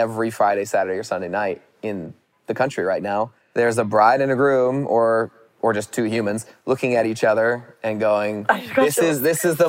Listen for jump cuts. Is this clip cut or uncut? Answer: cut